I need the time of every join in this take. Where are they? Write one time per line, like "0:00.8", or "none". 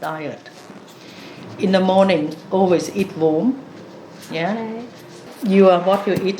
0:05.3